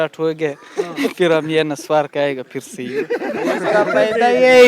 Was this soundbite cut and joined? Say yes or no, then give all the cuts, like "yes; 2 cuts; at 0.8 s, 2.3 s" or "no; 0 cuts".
no; 0 cuts